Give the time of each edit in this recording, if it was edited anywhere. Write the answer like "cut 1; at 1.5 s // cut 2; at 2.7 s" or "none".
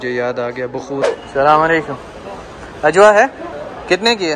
cut 1; at 1.2 s